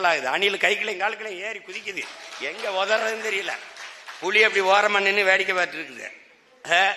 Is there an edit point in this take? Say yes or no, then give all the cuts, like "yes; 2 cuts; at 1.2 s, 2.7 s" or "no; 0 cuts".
no; 0 cuts